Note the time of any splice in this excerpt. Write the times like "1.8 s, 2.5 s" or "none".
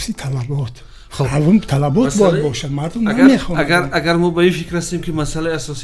none

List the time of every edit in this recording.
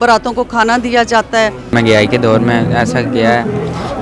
1.7 s

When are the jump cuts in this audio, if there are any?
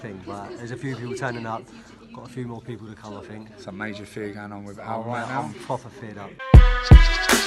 6.4 s

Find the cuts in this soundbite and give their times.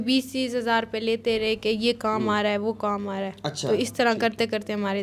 none

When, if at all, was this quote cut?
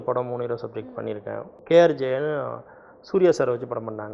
1.6 s

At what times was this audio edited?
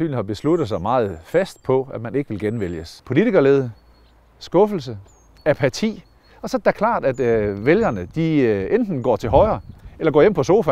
2.9 s

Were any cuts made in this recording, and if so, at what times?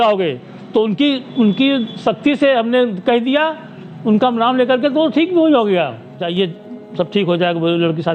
6.2 s

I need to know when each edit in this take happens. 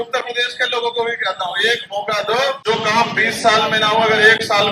2.6 s

